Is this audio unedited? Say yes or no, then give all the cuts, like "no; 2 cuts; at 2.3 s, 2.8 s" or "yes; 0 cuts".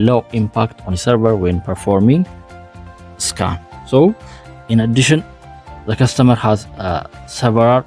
yes; 0 cuts